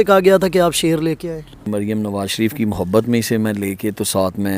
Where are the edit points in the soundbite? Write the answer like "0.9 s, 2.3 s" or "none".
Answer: 1.7 s